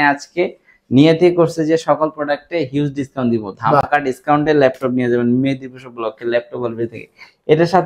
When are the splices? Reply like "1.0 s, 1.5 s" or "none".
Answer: none